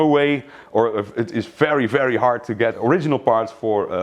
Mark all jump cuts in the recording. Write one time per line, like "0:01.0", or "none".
0:02.8